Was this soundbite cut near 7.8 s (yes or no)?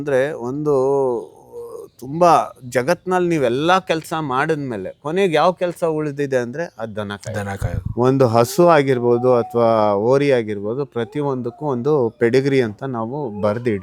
yes